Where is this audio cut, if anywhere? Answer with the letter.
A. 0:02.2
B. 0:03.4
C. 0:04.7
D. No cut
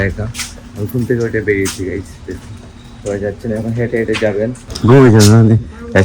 C